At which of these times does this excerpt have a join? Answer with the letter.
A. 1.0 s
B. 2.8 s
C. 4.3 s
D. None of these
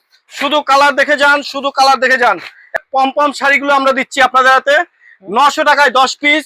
B